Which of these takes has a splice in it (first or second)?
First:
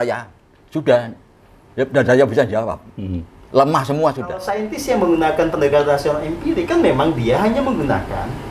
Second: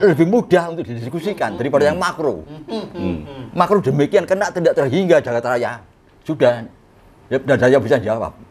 first